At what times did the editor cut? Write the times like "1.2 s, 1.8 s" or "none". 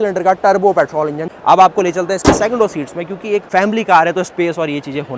1.3 s, 3.5 s